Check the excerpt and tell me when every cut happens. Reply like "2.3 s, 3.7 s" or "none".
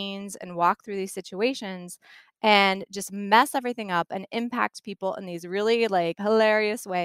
6.2 s